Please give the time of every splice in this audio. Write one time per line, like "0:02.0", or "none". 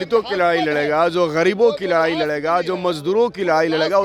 none